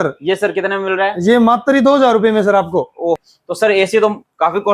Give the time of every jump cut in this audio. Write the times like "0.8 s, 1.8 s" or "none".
3.2 s